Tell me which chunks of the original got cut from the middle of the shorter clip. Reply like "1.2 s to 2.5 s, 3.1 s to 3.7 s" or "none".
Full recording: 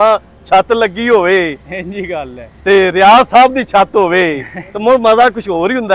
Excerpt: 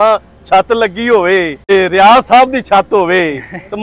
1.7 s to 2.7 s